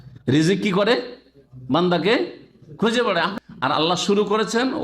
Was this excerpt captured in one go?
no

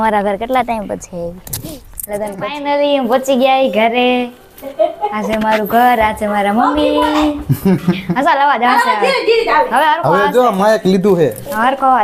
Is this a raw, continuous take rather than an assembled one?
no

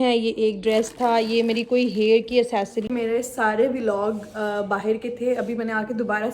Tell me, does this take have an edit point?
yes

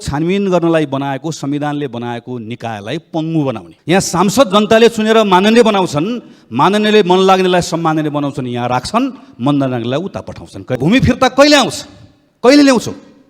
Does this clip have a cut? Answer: yes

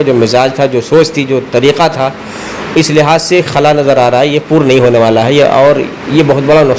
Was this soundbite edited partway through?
no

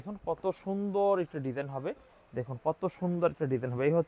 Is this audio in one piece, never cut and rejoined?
yes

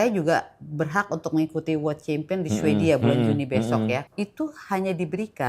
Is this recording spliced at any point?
yes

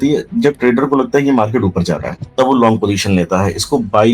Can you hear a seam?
no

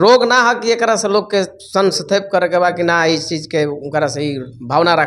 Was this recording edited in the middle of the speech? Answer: no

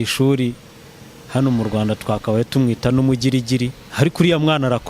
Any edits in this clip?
yes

